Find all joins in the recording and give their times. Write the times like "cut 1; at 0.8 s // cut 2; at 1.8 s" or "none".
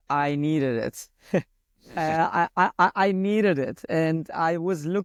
none